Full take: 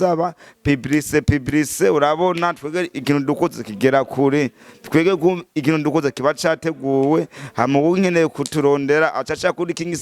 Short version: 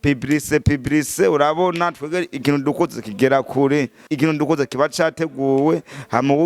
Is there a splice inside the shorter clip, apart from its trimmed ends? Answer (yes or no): yes